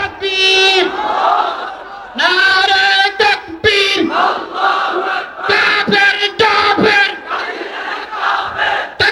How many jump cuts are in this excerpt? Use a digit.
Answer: 0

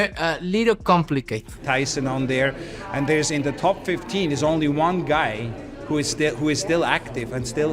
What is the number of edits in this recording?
1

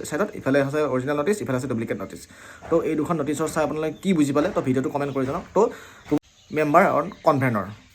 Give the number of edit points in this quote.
1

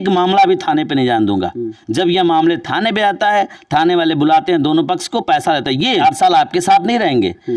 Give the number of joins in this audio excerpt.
2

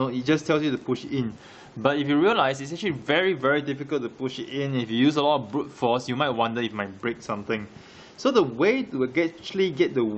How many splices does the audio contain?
1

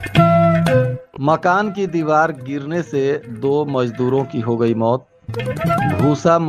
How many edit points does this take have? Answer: 1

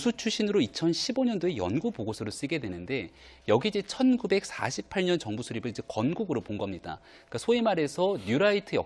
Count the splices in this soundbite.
1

